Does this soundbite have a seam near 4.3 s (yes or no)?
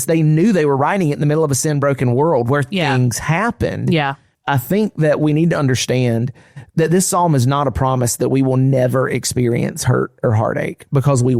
yes